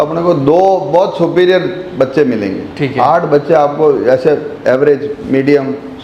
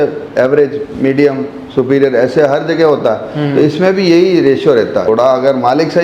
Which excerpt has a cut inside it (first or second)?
second